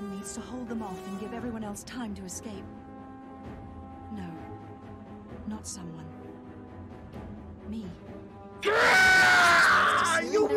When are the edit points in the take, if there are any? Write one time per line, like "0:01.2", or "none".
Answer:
none